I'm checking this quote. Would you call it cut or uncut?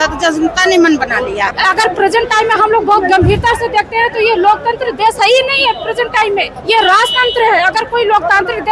cut